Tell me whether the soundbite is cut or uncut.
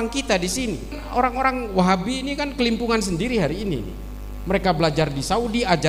cut